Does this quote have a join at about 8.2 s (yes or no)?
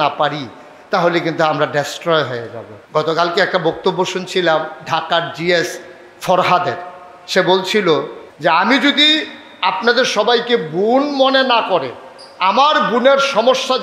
yes